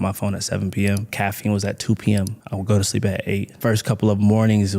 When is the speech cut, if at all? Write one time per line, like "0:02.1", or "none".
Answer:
0:01.1
0:02.5
0:03.5